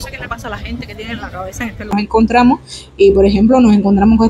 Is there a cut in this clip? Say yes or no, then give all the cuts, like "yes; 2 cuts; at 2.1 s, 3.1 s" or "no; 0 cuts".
yes; 1 cut; at 1.9 s